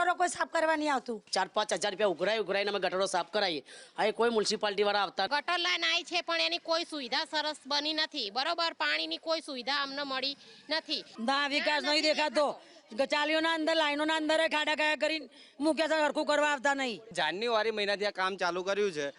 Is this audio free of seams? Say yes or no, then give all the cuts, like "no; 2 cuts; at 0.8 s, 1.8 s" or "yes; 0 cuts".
no; 4 cuts; at 1.2 s, 5.3 s, 11.0 s, 17.1 s